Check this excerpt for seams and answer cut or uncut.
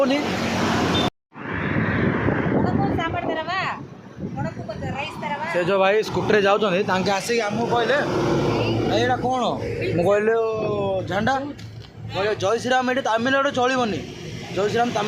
cut